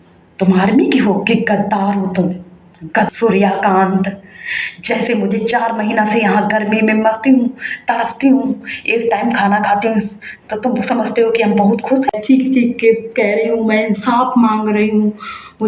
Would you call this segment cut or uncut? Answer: cut